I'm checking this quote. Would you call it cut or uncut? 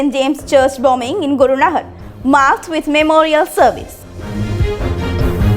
cut